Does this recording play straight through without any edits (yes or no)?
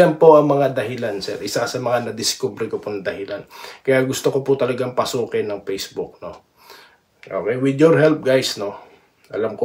yes